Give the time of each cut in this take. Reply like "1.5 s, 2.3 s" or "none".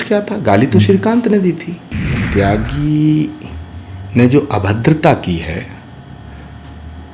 2.2 s